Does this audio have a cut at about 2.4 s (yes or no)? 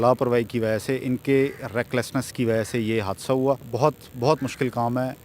no